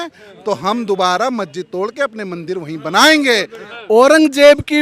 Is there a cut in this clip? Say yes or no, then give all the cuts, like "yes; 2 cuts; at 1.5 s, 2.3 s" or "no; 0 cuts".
yes; 1 cut; at 3.7 s